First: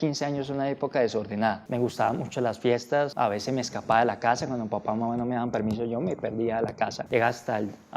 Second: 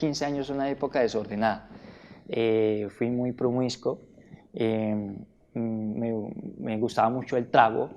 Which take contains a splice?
first; 3 cuts; at 1.6 s, 3.1 s, 7.0 s

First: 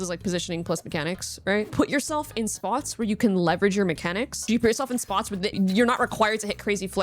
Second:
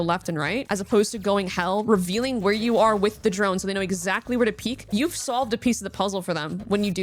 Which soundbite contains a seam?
first; 3 cuts; at 1.7 s, 4.3 s, 5.5 s

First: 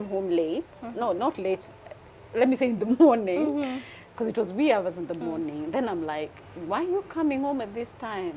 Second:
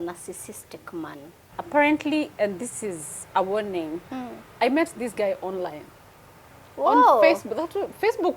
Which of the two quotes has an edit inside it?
second; 1 cut; at 1.0 s

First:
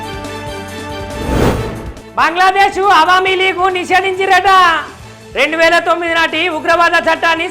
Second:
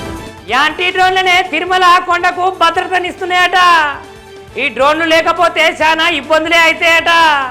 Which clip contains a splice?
first; 1 cut; at 1.1 s

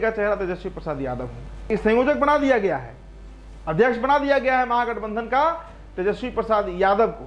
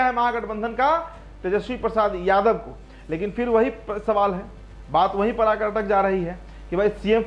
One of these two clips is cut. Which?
first; 1 cut; at 1.7 s

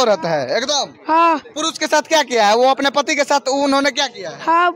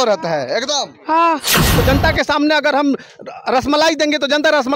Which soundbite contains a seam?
second; 1 cut; at 1.7 s

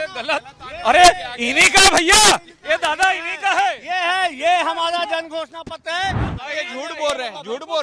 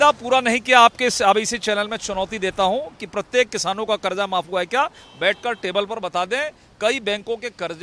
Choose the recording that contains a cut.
first; 1 cut; at 6.3 s

